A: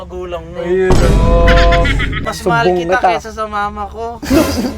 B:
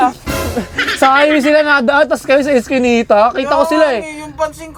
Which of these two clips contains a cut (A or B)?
A